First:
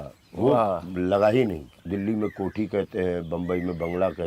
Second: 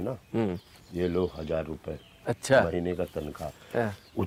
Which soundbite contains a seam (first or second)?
first